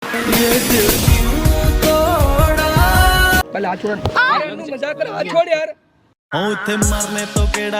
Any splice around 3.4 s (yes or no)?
yes